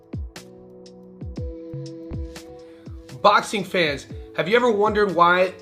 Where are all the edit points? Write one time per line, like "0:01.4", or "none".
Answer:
none